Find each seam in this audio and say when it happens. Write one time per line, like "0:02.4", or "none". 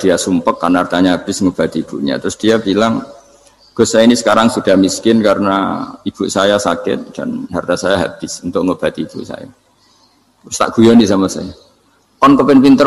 none